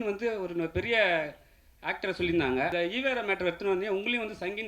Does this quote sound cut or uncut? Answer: cut